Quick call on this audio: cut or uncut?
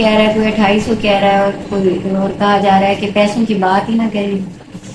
uncut